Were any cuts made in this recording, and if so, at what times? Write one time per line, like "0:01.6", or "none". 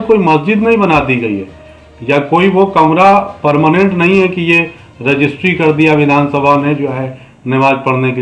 none